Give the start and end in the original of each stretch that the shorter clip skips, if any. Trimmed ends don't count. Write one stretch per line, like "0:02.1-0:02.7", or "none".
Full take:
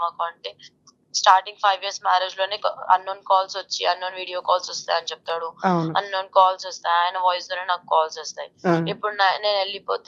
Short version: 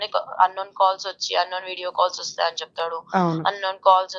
none

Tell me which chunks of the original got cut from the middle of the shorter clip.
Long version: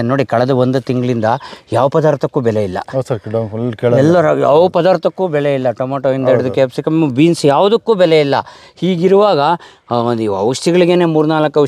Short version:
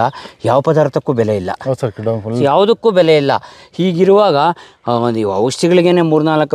0:03.7-0:07.4

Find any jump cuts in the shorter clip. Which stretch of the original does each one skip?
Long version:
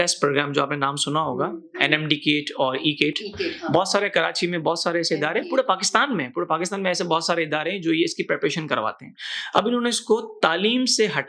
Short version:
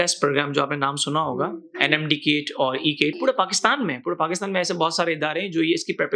0:03.2-0:05.5

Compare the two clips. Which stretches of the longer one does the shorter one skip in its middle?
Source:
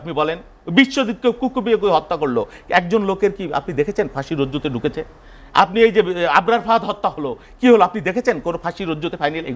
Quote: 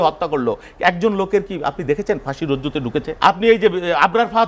0:05.0-0:05.4

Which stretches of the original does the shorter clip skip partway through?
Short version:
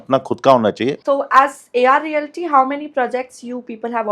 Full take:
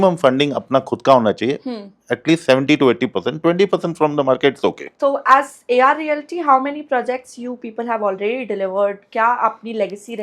0:01.6-0:04.9

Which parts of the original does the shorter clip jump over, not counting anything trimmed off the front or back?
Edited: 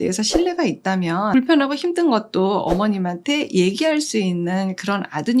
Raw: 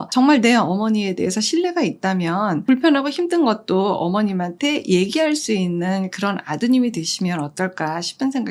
0:02.5-0:02.7

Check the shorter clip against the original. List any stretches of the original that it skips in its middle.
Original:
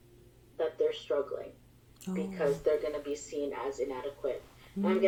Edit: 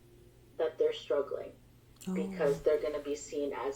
none

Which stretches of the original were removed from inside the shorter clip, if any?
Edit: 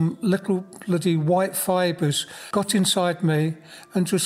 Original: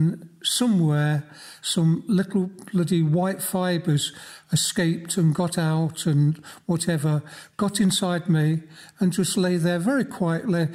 0:04.2-0:07.4

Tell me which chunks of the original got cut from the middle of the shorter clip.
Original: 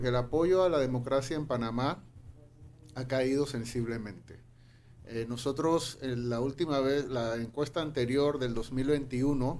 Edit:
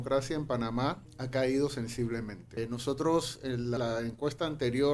0:02.1-0:02.9
0:04.2-0:05.0
0:06.3-0:07.1

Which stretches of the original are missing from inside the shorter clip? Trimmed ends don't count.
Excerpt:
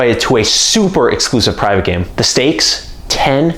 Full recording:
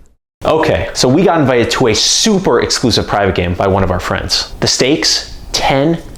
0:03.5-0:04.5

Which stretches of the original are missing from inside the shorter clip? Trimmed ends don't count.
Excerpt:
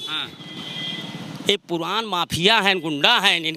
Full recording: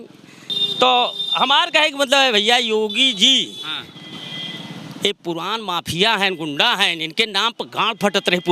none

